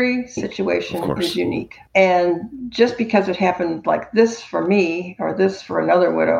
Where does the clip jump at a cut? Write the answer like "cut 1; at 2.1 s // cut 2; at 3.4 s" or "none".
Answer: cut 1; at 1.8 s